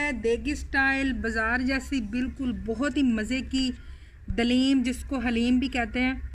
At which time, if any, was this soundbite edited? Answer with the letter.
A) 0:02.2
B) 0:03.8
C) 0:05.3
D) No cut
D